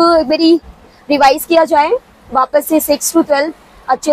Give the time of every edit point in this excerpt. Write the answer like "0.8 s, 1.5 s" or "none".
none